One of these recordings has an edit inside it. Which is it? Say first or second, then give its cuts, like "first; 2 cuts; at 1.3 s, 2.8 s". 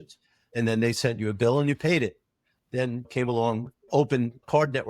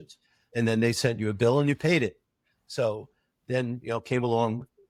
first; 2 cuts; at 2.7 s, 3.9 s